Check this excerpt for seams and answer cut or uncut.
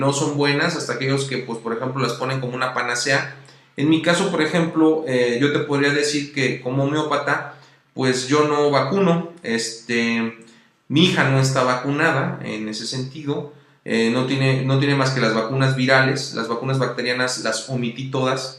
uncut